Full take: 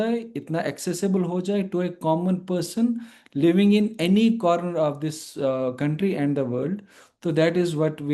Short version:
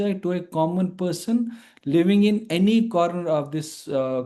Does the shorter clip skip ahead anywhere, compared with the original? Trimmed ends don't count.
no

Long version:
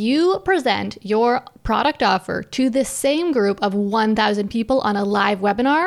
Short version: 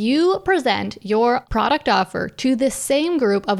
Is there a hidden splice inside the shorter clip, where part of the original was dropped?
yes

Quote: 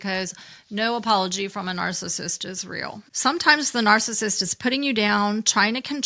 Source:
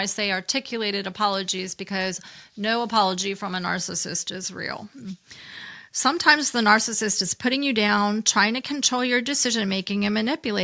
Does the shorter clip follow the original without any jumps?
no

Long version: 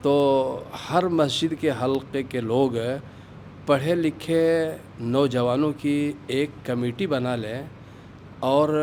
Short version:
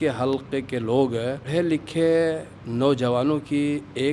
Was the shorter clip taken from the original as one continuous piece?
no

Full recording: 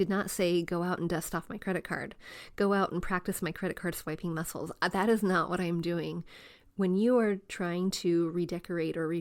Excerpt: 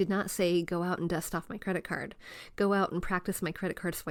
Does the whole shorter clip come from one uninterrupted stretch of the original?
yes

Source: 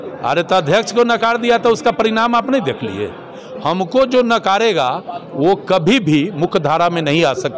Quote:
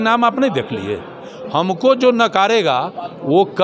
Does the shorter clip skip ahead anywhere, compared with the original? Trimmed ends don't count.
no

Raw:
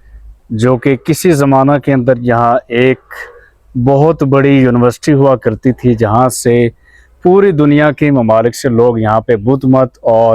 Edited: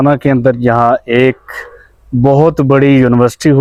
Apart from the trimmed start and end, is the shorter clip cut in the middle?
no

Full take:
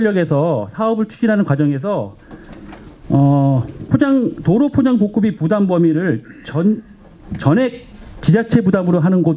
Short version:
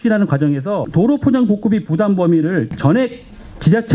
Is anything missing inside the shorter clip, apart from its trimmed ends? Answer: yes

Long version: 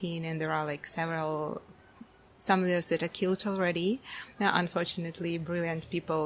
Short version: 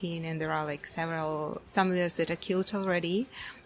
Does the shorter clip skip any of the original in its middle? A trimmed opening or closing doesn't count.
yes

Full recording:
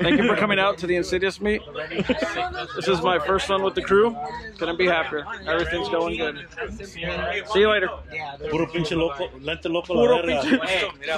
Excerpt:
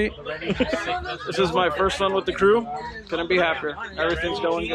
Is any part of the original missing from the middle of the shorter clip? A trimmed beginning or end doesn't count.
no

